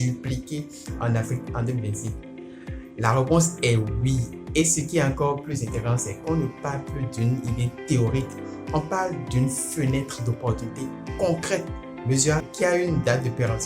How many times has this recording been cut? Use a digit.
1